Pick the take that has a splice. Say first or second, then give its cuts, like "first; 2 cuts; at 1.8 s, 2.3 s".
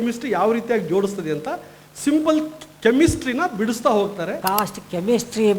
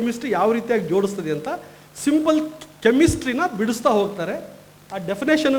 first; 1 cut; at 4.4 s